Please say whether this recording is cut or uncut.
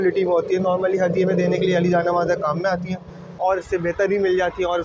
cut